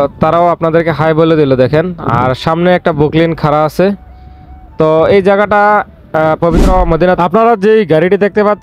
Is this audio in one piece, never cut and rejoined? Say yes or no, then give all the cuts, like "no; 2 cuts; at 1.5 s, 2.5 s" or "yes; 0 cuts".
no; 1 cut; at 7.2 s